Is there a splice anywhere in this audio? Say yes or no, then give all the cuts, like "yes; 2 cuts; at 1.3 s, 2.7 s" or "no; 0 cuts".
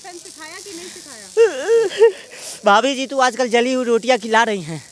no; 0 cuts